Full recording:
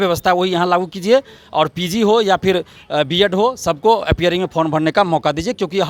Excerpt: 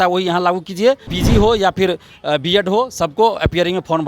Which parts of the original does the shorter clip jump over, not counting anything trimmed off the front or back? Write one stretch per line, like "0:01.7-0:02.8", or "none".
0:01.4-0:01.8